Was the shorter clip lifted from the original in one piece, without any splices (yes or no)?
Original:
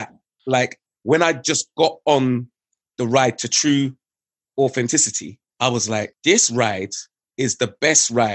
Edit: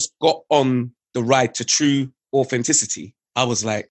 no